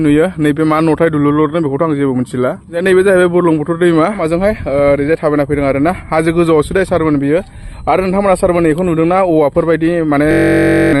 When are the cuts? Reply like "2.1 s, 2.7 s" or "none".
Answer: 2.7 s, 4.2 s